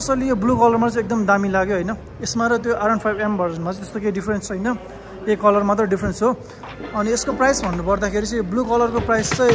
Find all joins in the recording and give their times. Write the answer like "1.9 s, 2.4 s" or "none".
none